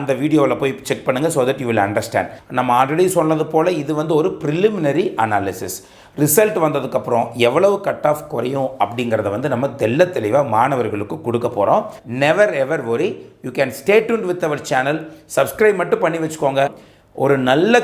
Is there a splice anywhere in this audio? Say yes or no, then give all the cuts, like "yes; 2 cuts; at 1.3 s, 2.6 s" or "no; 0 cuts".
yes; 3 cuts; at 2.4 s, 12.0 s, 16.9 s